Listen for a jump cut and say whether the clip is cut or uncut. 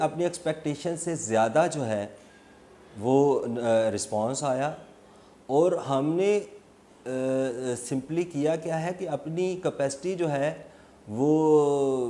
uncut